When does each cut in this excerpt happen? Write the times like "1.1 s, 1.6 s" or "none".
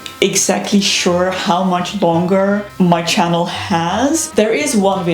2.7 s, 4.3 s